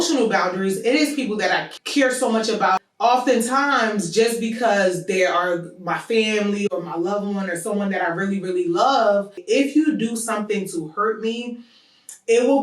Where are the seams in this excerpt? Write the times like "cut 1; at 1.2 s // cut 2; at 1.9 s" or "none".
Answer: cut 1; at 1.8 s // cut 2; at 2.8 s // cut 3; at 9.4 s